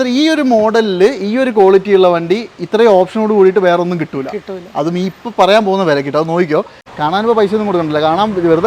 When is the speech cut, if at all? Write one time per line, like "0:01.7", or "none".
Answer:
0:06.8